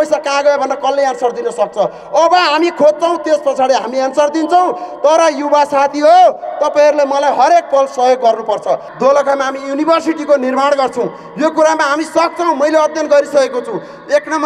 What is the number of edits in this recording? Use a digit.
1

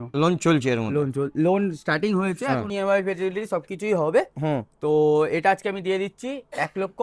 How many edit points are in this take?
1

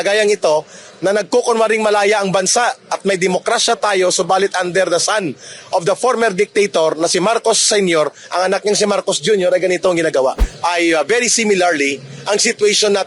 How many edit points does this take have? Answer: 1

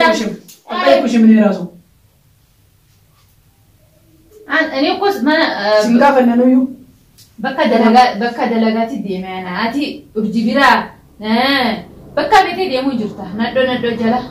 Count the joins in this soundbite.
0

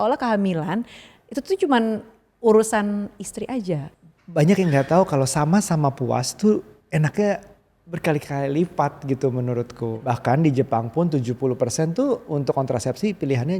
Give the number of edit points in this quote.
2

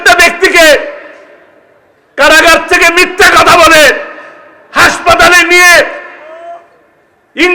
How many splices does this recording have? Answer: 0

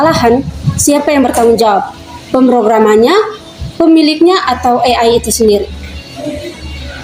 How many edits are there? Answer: 0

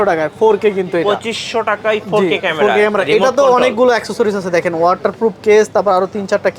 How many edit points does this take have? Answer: 0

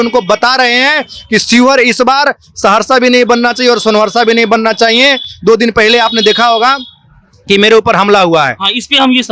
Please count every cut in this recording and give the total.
0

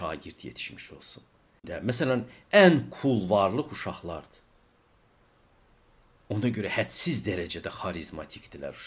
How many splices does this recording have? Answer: 1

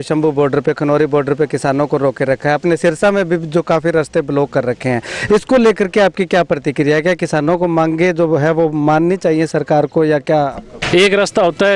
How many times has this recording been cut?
1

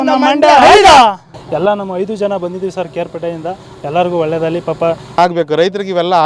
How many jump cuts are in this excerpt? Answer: 1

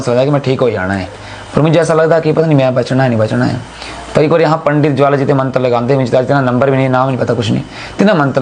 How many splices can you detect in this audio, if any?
0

